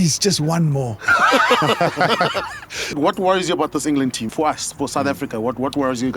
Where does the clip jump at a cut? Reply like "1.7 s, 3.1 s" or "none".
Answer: 2.9 s, 4.3 s